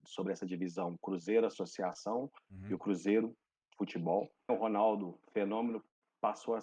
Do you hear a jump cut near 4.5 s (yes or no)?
yes